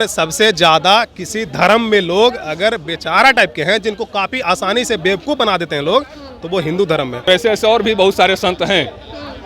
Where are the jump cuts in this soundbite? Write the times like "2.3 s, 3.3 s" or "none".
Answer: 7.3 s